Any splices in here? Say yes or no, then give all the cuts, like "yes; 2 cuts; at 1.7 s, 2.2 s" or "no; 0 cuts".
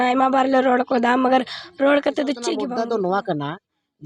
yes; 1 cut; at 2.6 s